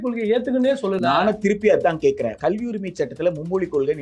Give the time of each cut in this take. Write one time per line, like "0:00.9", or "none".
0:02.3

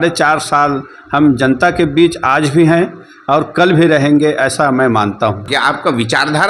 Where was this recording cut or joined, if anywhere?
0:05.5

